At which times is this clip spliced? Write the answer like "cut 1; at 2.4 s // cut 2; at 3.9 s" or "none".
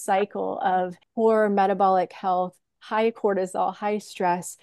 cut 1; at 1.0 s